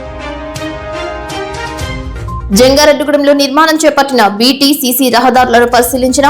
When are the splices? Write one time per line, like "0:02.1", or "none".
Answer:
0:02.4